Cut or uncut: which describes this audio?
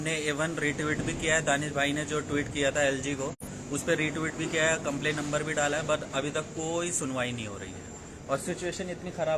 uncut